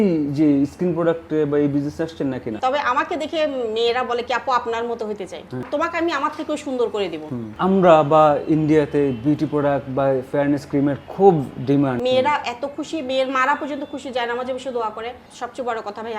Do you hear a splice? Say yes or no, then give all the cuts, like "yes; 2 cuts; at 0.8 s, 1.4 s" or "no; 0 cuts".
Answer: yes; 5 cuts; at 2.6 s, 5.7 s, 7.5 s, 12.0 s, 15.2 s